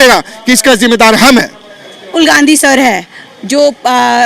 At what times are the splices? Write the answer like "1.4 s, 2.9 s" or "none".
2.1 s